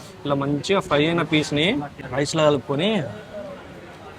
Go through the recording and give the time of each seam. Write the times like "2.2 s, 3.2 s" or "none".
2.0 s